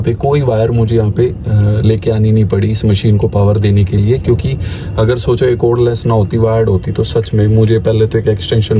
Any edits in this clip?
no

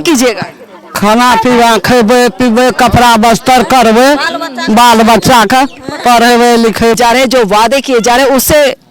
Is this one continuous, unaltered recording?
no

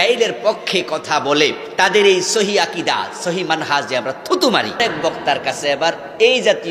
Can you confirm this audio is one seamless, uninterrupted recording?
no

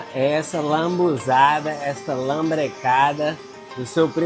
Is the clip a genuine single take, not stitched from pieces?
yes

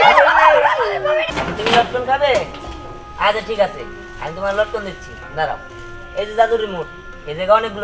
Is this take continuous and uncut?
no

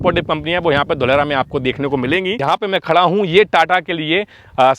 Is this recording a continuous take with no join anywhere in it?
no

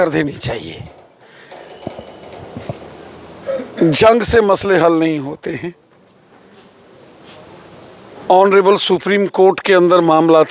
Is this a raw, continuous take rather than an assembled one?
yes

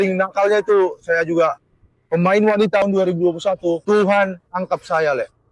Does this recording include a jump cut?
yes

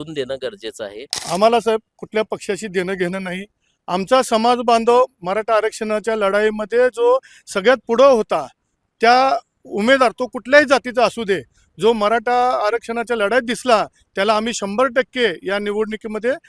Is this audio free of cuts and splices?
no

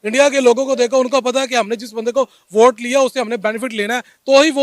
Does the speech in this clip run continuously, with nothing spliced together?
yes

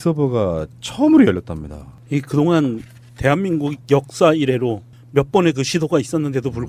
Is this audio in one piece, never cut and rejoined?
yes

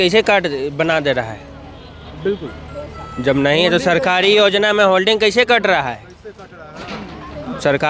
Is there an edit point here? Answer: no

